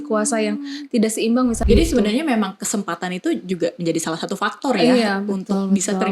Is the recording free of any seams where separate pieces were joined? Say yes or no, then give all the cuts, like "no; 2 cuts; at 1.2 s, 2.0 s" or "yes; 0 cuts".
no; 1 cut; at 1.6 s